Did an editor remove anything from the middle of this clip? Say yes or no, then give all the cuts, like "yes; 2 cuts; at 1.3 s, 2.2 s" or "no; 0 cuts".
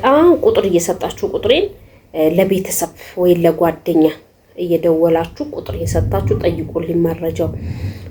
no; 0 cuts